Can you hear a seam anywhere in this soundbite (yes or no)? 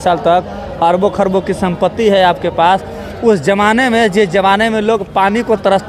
no